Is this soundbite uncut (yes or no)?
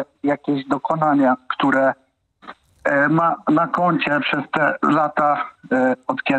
yes